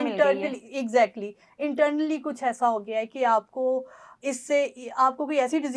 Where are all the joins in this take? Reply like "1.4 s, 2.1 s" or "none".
none